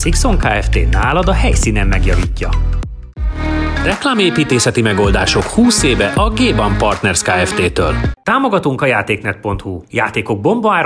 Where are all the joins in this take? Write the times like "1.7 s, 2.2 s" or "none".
3.1 s, 8.1 s